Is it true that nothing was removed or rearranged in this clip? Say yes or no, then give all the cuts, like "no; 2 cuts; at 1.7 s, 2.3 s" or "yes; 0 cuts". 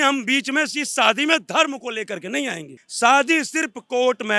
no; 1 cut; at 2.8 s